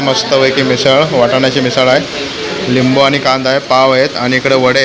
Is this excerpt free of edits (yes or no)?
yes